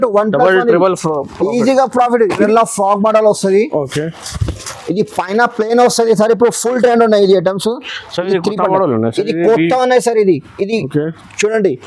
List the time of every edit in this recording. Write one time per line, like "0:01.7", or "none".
0:02.4